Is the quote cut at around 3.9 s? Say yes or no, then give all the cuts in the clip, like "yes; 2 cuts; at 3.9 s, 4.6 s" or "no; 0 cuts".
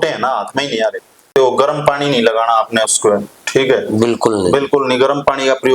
no; 1 cut; at 1.3 s